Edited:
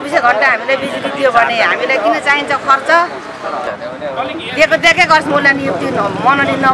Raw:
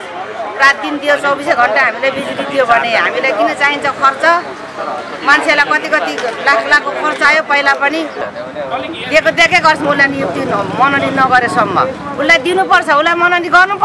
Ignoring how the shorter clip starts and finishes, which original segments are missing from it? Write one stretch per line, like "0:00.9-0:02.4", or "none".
0:05.1-0:08.3

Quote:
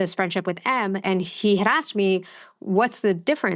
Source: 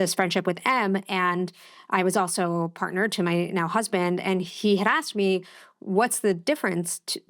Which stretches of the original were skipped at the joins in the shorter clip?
0:01.0-0:04.2

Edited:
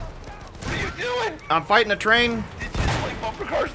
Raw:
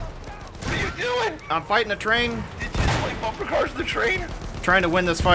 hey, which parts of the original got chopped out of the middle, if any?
none

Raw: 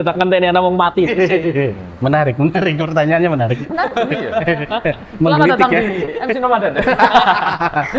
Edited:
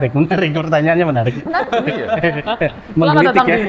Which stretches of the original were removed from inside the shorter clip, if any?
none

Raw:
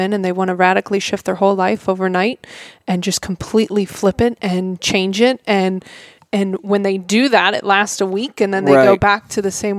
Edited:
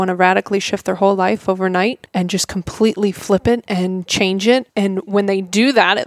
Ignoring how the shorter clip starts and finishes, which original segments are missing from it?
0:02.4-0:02.8
0:05.4-0:06.2

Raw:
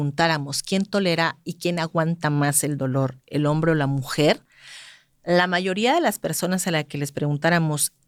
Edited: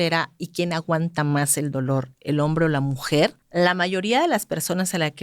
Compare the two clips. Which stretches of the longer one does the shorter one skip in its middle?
0:04.5-0:05.1

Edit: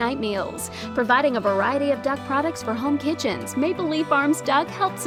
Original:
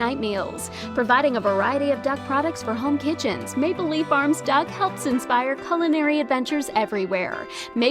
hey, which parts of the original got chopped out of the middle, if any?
none

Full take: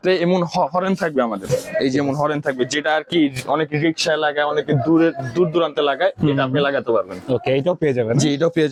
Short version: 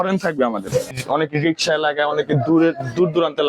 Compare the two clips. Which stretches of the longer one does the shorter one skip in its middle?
0:01.7-0:03.3

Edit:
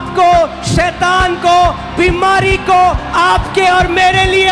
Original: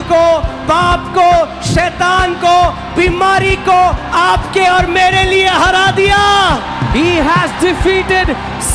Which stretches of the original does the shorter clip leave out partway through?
none

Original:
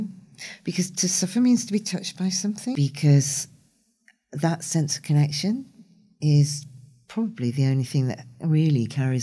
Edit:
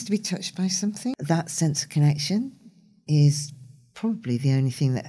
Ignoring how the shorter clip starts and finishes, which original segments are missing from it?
0:02.8-0:04.3

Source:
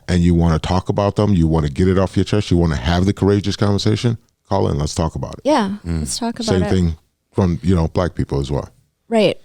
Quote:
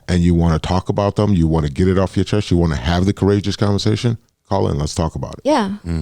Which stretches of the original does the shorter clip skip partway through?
none

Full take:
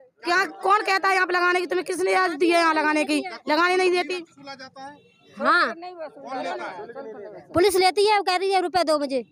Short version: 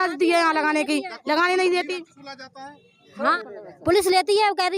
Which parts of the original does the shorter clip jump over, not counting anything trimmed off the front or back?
0:05.6-0:07.1

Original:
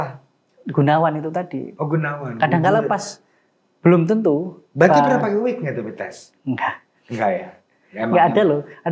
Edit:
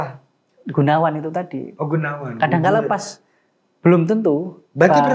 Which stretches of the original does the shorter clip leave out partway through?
none

